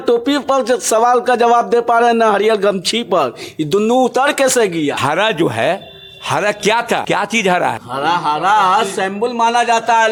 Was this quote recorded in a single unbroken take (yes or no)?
yes